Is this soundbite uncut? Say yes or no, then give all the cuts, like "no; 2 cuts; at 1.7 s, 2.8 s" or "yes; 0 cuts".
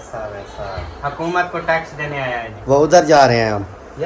no; 1 cut; at 2.5 s